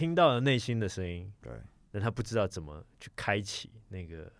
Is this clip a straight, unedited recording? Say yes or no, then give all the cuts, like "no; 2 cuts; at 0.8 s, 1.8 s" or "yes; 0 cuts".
yes; 0 cuts